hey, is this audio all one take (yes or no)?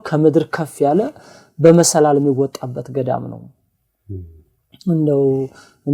yes